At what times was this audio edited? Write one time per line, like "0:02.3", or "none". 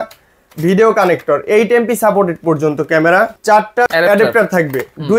0:03.5